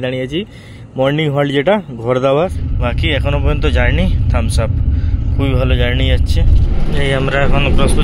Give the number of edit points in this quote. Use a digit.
2